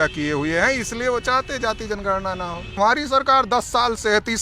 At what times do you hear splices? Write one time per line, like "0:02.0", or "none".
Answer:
0:02.8